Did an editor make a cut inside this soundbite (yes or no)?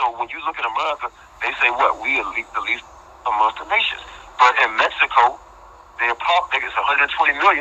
yes